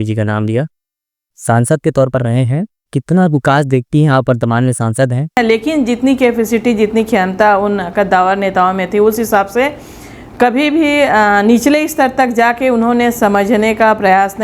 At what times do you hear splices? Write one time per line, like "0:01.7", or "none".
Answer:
0:05.4